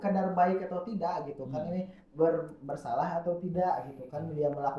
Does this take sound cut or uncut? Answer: uncut